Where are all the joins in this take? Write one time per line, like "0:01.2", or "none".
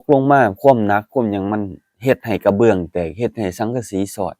none